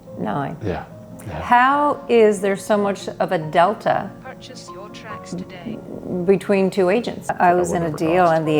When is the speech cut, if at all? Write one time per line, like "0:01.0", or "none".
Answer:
0:07.3